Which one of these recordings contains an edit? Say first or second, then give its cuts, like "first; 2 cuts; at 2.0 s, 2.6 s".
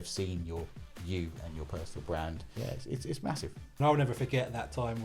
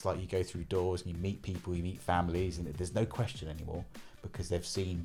first; 2 cuts; at 2.4 s, 3.8 s